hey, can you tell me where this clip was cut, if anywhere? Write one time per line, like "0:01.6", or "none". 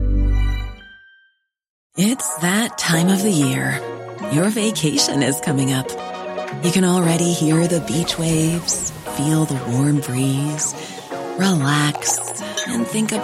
0:01.8